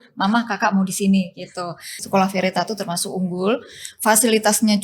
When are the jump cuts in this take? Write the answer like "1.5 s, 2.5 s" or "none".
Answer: 2.0 s